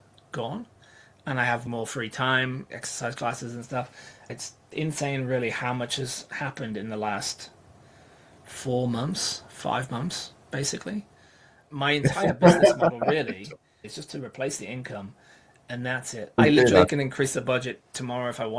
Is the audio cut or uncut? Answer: cut